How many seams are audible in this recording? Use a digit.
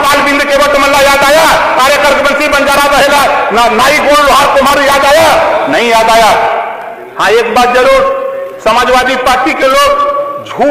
1